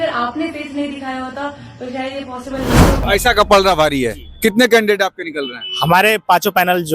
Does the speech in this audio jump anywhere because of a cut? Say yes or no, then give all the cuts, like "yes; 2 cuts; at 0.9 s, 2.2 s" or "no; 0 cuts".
yes; 1 cut; at 3.0 s